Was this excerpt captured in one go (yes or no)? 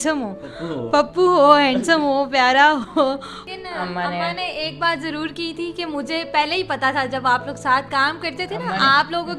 no